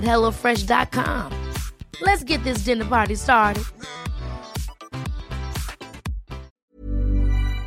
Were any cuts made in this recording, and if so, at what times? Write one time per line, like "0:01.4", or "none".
0:06.5